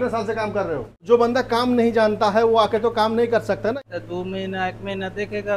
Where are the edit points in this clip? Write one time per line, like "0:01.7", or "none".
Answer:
0:01.0
0:03.8